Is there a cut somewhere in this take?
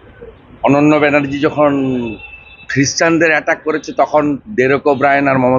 no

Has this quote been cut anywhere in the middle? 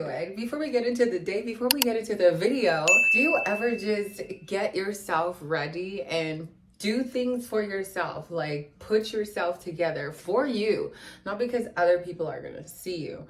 yes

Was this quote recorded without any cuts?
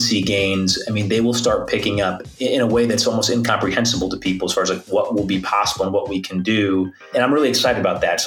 no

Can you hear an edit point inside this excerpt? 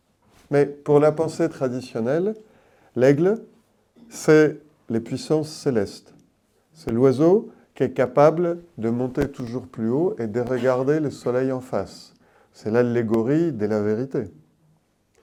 no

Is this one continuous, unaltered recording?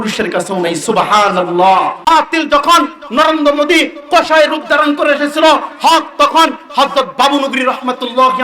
no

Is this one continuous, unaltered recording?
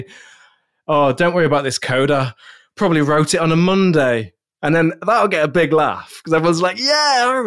yes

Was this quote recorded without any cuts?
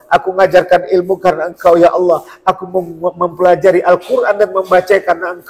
yes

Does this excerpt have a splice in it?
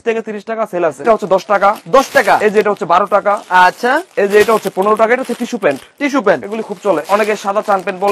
yes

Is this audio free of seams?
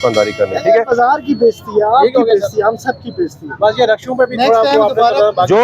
yes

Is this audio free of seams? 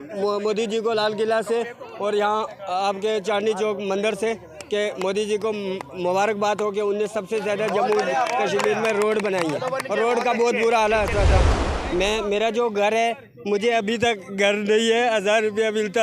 no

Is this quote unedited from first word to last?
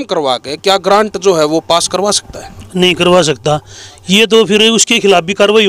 yes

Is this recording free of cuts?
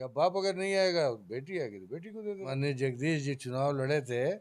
no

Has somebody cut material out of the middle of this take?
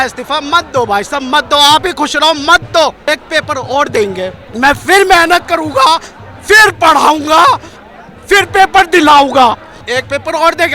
yes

